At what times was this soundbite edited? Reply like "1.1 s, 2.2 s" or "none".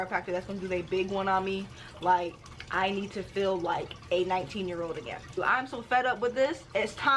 5.4 s